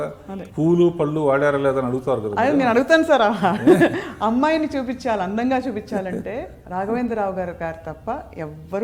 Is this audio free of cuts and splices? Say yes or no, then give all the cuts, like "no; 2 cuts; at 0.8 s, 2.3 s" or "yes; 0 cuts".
yes; 0 cuts